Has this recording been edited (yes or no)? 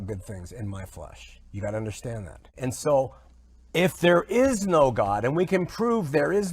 yes